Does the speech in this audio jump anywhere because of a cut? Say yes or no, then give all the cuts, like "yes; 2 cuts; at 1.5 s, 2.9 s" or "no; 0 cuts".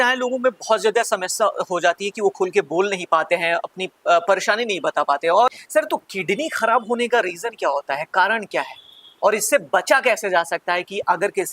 yes; 1 cut; at 5.5 s